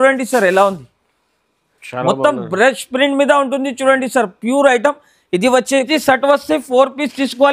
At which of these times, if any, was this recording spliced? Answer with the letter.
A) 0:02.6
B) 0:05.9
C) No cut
B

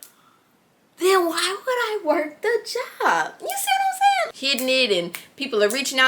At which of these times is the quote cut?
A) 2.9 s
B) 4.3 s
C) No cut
B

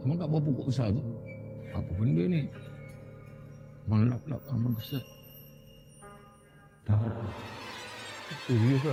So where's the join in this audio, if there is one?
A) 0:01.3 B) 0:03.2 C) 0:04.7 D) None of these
D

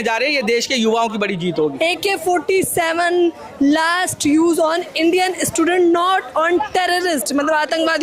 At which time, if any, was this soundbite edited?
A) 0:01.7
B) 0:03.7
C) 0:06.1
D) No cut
A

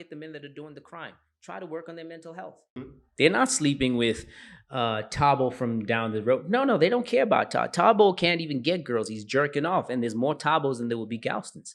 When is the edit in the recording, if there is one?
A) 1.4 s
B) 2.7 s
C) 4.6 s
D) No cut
B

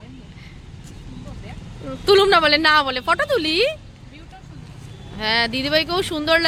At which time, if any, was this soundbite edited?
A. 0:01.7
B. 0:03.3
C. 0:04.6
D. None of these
D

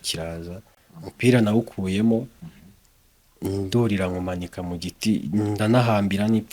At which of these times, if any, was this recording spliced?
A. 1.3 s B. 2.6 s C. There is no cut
C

